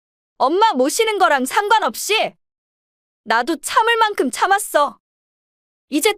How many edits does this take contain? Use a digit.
0